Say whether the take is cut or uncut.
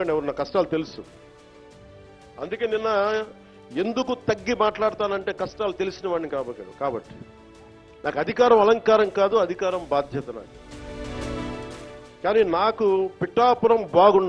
uncut